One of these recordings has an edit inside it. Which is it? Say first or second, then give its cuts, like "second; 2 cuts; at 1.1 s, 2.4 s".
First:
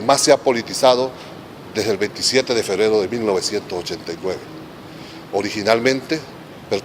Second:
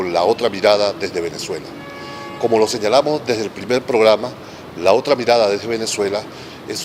first; 1 cut; at 3.9 s